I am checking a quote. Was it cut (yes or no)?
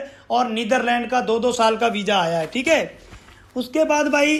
no